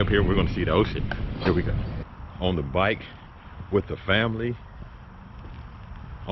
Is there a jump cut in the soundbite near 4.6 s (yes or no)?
no